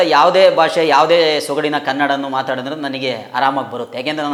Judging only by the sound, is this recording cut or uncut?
uncut